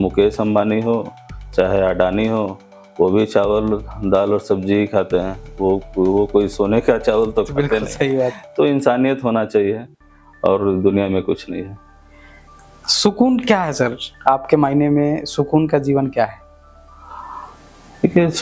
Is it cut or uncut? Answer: uncut